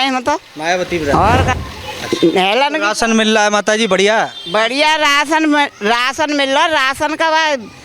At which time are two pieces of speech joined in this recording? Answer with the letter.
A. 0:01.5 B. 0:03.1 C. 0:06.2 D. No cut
A